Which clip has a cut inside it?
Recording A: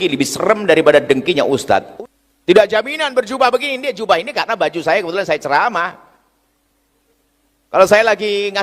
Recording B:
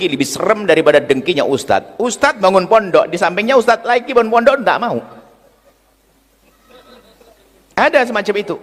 A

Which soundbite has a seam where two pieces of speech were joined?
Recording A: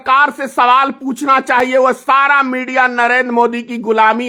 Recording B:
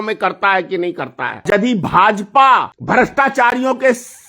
B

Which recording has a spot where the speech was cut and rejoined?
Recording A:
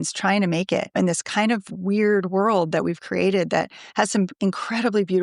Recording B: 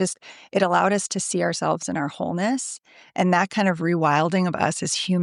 A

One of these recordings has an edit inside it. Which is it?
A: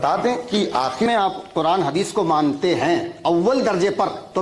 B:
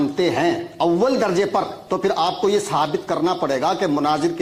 A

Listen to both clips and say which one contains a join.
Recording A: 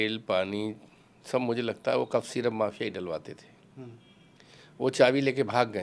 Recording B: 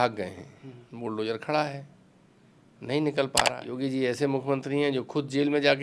B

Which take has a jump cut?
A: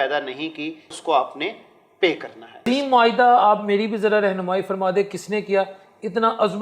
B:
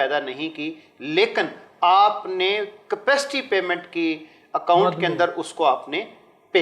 A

